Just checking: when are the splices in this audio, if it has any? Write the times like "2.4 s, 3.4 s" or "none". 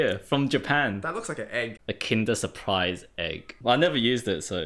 1.8 s, 3.5 s